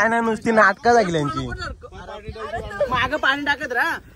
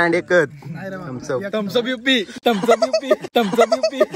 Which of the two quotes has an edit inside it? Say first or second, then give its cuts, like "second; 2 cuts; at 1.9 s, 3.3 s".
second; 1 cut; at 3.3 s